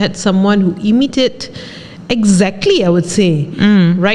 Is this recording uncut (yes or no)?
yes